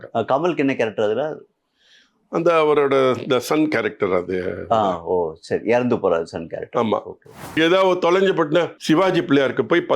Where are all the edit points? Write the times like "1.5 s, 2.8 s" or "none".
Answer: 7.5 s, 8.8 s